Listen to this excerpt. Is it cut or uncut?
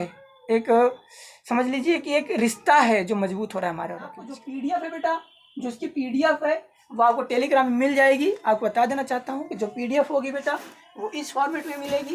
cut